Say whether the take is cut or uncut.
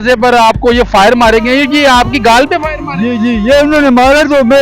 uncut